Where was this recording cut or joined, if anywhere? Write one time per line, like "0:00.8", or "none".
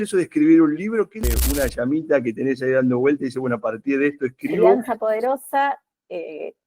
0:01.2
0:04.8